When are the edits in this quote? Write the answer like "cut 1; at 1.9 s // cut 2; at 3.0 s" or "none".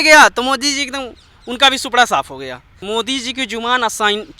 cut 1; at 2.7 s